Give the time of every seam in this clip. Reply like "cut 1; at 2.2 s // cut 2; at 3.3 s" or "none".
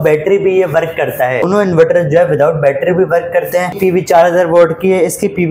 cut 1; at 1.5 s // cut 2; at 3.8 s